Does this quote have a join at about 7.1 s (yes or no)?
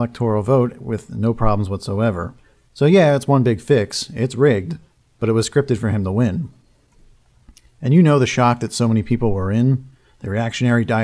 no